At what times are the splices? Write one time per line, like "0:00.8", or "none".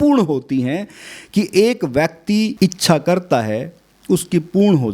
0:02.5